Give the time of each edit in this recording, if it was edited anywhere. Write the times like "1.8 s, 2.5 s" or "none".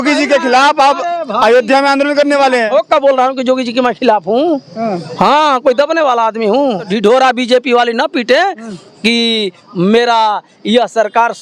6.9 s